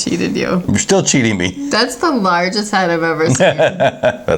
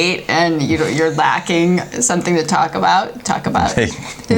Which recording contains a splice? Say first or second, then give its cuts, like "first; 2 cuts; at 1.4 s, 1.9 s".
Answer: first; 1 cut; at 1.6 s